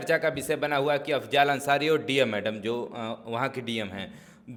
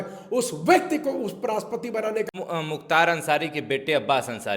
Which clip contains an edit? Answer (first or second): second